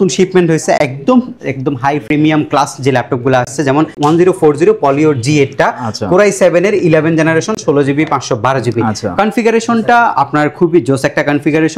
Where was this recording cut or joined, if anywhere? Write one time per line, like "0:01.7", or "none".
none